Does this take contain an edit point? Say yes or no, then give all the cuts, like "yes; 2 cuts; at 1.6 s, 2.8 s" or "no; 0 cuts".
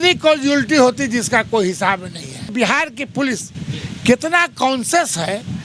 yes; 1 cut; at 2.5 s